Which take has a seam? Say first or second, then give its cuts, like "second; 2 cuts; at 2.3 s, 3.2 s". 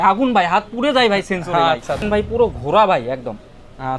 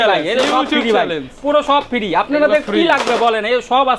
first; 1 cut; at 2.0 s